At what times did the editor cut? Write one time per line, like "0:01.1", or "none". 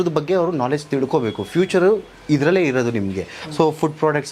none

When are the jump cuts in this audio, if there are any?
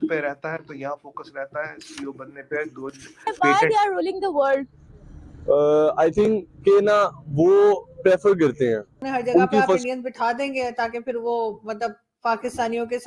0:03.2
0:09.8

